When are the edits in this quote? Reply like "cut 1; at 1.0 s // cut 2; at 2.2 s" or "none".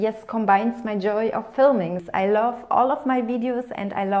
cut 1; at 2.0 s